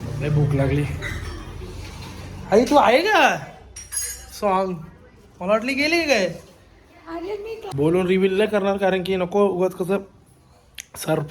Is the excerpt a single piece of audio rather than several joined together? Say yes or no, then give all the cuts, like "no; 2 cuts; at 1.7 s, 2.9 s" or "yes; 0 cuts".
no; 1 cut; at 7.7 s